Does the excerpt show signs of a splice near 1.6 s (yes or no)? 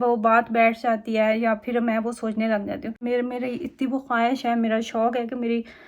no